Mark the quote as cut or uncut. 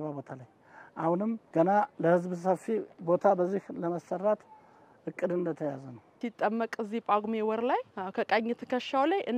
cut